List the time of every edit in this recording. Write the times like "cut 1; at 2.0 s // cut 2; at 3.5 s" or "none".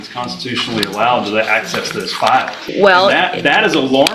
cut 1; at 2.6 s